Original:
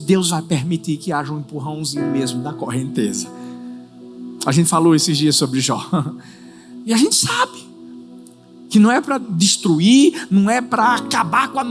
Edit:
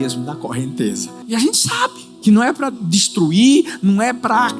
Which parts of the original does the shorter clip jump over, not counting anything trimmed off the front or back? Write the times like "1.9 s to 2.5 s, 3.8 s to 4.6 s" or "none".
3.3 s to 6.7 s, 7.6 s to 8.5 s